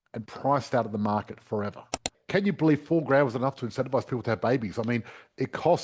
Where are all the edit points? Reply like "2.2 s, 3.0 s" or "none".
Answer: 2.1 s